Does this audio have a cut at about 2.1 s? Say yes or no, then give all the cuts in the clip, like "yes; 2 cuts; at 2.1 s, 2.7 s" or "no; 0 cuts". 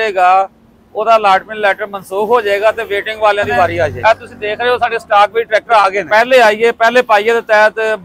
no; 2 cuts; at 4.0 s, 6.0 s